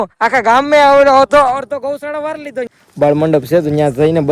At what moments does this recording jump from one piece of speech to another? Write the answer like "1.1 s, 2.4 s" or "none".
2.8 s